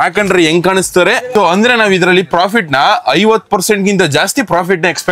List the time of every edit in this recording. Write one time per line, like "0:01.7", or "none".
0:01.3